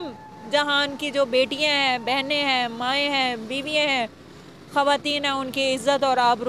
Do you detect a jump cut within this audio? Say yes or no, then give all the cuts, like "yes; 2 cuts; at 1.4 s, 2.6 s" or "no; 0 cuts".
no; 0 cuts